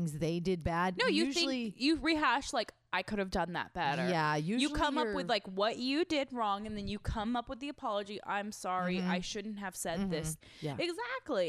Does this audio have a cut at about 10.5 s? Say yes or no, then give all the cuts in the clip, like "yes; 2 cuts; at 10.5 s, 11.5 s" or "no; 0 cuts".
yes; 1 cut; at 10.5 s